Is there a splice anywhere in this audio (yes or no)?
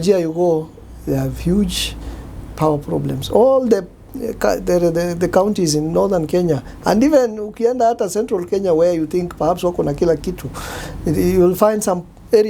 no